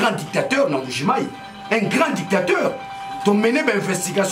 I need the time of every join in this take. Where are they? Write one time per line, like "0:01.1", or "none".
none